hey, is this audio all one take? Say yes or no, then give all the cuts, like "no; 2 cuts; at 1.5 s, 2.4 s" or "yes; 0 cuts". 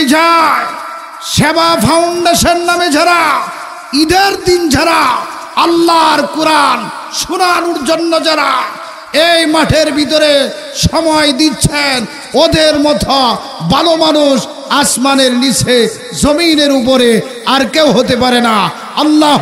yes; 0 cuts